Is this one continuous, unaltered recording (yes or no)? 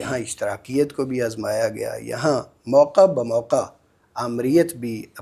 yes